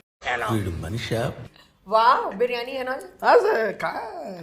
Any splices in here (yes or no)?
no